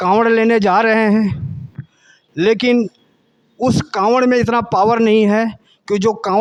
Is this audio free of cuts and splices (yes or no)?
yes